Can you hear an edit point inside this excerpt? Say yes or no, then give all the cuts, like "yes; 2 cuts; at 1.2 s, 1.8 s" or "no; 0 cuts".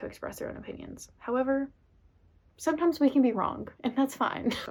no; 0 cuts